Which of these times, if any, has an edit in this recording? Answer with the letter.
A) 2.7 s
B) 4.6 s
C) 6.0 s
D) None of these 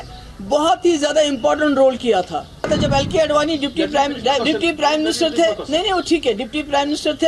A